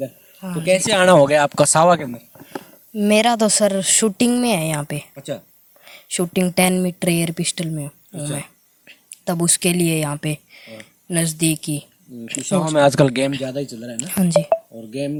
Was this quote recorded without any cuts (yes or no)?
yes